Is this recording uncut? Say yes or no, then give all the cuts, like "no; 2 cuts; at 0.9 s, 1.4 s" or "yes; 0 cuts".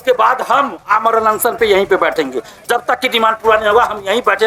yes; 0 cuts